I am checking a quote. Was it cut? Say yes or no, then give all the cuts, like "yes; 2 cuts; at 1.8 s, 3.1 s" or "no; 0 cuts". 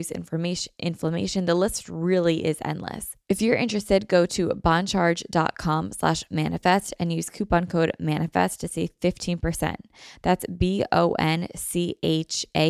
yes; 1 cut; at 3.1 s